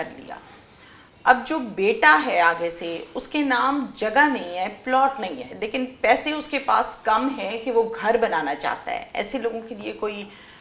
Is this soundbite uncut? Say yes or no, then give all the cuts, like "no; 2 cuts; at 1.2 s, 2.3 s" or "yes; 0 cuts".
yes; 0 cuts